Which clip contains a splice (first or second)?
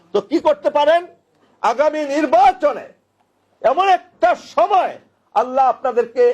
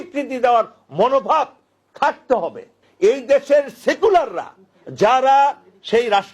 second